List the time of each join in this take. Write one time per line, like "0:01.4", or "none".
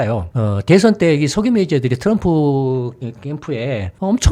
none